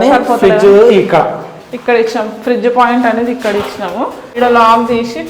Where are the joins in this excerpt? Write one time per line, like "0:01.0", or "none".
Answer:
0:04.2